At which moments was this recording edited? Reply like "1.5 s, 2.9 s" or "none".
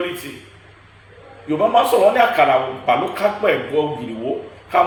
none